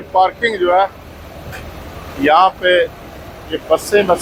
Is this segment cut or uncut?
uncut